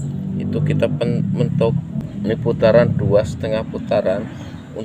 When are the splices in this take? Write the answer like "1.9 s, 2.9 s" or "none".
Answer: 2.0 s